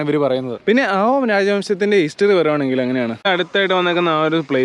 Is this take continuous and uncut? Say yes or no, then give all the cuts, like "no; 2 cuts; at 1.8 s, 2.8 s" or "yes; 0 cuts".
no; 1 cut; at 3.2 s